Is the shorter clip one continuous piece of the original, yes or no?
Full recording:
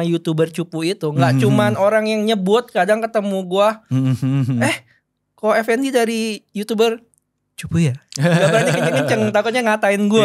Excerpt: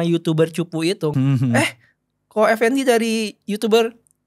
no